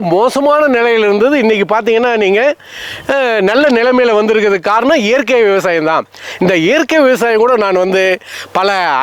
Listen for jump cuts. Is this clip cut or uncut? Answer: uncut